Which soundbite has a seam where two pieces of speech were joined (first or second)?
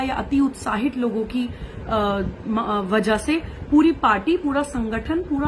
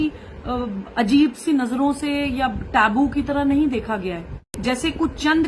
second